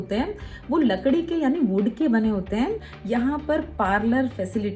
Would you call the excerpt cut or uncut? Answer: cut